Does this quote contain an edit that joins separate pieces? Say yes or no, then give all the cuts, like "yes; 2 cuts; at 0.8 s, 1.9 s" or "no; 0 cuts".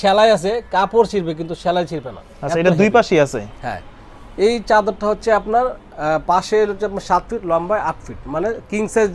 no; 0 cuts